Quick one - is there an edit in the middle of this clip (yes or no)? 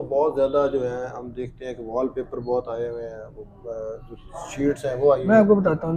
no